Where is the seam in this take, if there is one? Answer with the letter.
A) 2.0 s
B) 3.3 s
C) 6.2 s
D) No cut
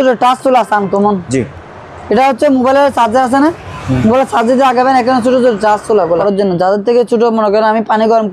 C